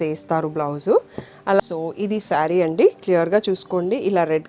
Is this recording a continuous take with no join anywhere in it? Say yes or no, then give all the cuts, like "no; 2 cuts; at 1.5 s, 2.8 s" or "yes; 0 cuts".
no; 1 cut; at 1.6 s